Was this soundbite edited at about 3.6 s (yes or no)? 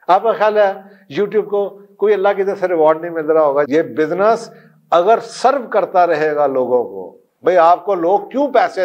yes